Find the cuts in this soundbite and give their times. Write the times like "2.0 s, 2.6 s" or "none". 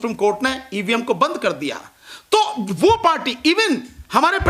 none